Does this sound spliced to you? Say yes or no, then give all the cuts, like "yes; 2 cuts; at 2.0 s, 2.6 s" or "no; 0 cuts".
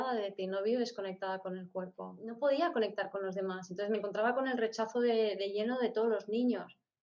yes; 1 cut; at 2.2 s